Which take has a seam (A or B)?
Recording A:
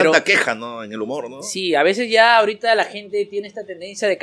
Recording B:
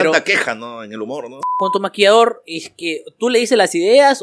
B